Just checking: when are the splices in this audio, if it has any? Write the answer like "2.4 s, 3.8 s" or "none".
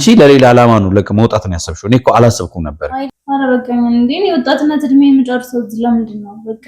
3.0 s